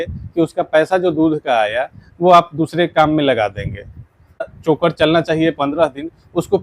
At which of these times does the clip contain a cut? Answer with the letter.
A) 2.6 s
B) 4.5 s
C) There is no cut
B